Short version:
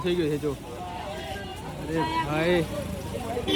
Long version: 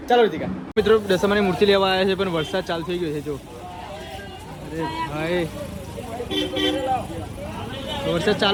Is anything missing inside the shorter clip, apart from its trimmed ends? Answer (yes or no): no